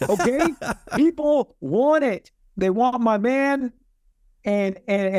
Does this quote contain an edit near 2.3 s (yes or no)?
yes